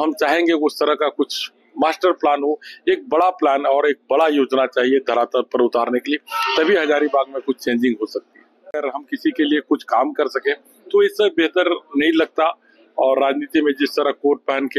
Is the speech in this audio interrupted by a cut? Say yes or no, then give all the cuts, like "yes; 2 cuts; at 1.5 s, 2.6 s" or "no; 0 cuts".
yes; 1 cut; at 8.8 s